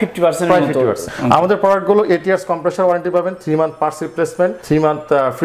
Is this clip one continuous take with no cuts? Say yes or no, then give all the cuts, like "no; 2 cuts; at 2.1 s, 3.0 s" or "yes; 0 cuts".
no; 2 cuts; at 1.1 s, 4.6 s